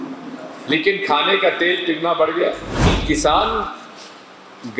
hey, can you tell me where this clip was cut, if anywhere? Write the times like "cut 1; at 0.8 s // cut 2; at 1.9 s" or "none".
cut 1; at 2.9 s